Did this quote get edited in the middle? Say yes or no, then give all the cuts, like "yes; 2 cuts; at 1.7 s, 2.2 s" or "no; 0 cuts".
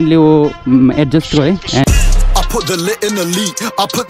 yes; 1 cut; at 1.9 s